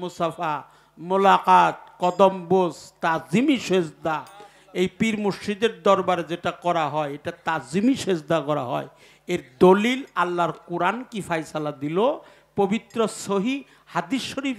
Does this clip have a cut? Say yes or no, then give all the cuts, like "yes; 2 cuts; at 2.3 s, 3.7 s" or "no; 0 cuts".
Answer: no; 0 cuts